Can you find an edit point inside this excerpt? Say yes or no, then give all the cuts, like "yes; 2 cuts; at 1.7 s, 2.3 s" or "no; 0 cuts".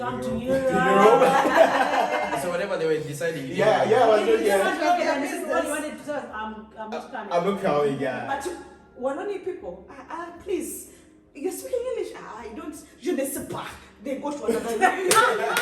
yes; 1 cut; at 8.3 s